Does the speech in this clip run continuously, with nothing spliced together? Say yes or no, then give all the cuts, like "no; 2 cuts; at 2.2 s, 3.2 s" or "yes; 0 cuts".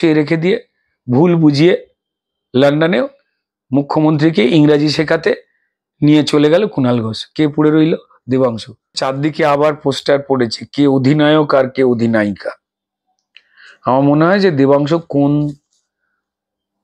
no; 1 cut; at 9.0 s